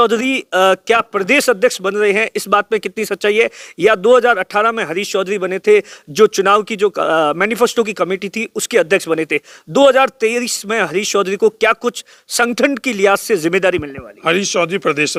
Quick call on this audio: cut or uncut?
uncut